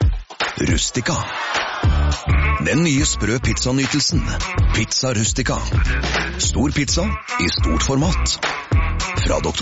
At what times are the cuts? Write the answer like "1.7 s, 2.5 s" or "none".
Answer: none